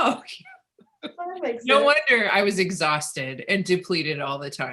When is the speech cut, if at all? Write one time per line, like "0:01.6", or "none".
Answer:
none